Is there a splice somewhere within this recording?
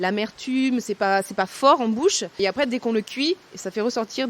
yes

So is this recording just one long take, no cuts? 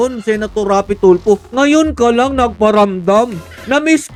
yes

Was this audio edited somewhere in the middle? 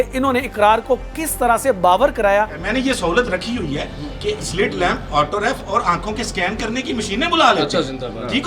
yes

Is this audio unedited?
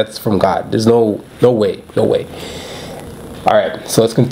yes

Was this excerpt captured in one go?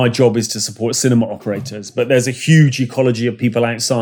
yes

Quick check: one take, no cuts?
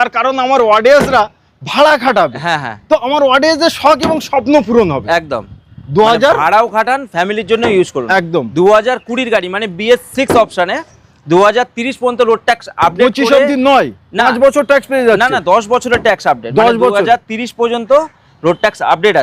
yes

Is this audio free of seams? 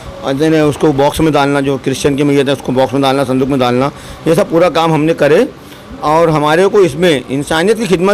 yes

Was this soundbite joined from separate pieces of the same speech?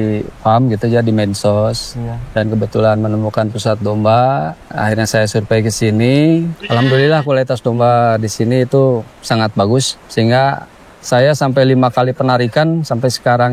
yes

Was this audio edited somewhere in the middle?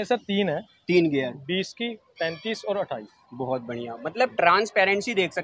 no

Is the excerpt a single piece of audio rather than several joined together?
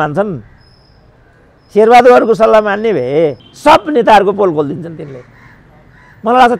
no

